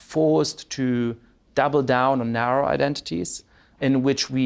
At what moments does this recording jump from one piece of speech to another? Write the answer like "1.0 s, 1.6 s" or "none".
3.4 s